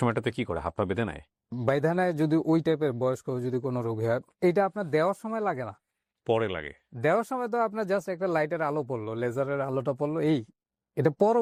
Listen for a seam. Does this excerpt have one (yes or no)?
no